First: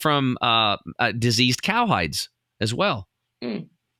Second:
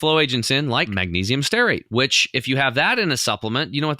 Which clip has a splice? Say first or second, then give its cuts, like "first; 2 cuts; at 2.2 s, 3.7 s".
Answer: second; 2 cuts; at 0.9 s, 1.9 s